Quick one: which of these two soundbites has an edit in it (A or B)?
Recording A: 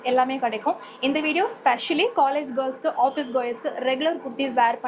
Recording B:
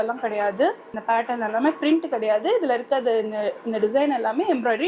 B